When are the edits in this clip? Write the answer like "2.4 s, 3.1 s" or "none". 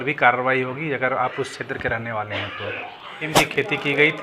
3.3 s